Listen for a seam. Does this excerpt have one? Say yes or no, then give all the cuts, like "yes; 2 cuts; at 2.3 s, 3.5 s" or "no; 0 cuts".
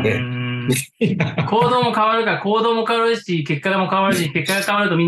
no; 0 cuts